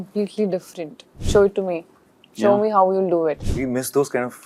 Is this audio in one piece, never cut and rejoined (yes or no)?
no